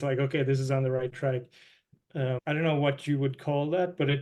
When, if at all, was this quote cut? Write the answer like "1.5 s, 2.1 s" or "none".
1.9 s

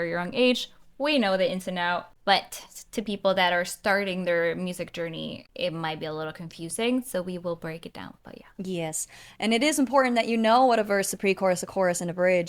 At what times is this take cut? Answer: 2.1 s, 5.4 s

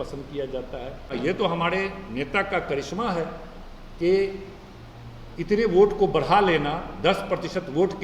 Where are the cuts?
1.1 s

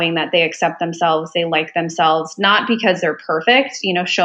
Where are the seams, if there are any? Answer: none

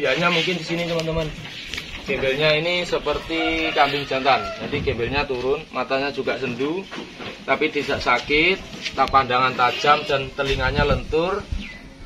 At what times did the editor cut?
none

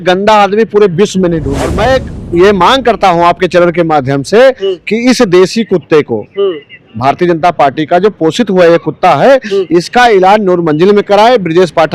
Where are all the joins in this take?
1.6 s

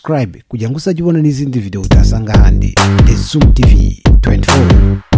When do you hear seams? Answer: none

